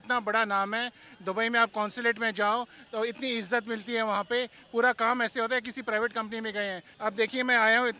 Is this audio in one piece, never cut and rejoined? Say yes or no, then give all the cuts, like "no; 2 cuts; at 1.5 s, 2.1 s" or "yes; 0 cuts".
no; 1 cut; at 6.9 s